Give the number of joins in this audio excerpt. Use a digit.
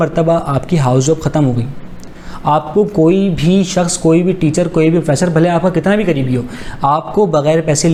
0